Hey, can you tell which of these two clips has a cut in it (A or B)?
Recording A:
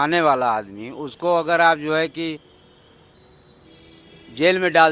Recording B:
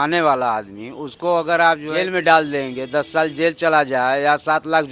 B